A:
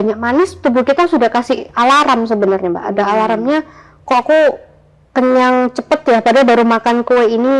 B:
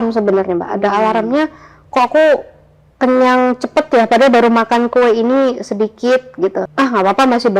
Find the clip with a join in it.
B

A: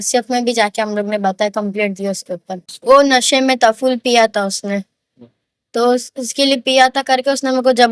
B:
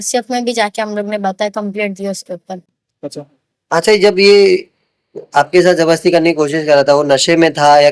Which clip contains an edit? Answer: A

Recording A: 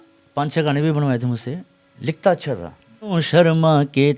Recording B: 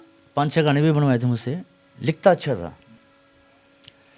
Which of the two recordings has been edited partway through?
A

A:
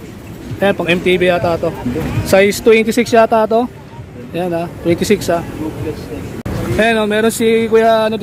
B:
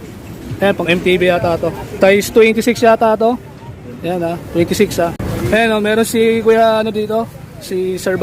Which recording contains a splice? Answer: B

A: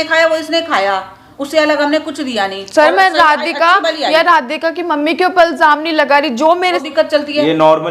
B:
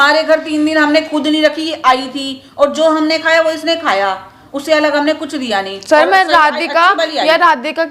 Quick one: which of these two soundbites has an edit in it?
A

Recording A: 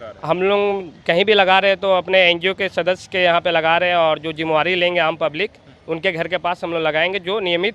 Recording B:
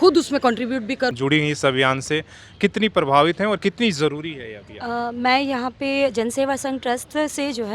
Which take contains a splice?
B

